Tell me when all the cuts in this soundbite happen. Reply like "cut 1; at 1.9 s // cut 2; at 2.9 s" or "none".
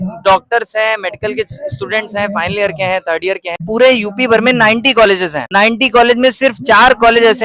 cut 1; at 3.7 s // cut 2; at 5.4 s